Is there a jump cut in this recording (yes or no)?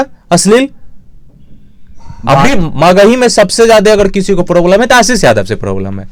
no